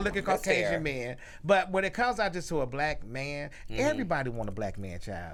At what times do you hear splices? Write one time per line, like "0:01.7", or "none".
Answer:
none